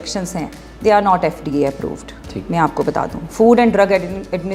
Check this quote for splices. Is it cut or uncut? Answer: uncut